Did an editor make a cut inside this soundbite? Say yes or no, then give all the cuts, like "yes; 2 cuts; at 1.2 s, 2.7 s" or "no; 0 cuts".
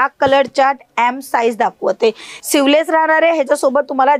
yes; 1 cut; at 2.3 s